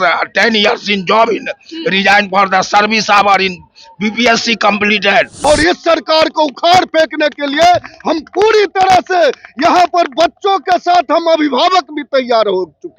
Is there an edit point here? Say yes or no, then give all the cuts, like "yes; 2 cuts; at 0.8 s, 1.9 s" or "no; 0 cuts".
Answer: yes; 1 cut; at 5.3 s